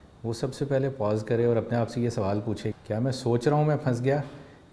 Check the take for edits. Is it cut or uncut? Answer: cut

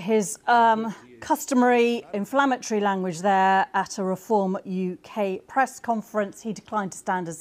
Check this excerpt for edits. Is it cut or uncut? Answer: uncut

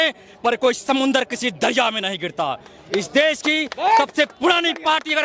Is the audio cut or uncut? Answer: uncut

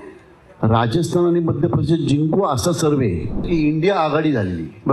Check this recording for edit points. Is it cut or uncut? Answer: cut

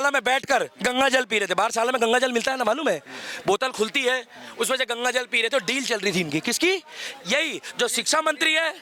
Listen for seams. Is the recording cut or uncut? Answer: uncut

